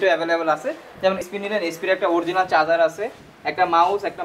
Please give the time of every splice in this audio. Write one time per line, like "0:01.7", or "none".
0:01.2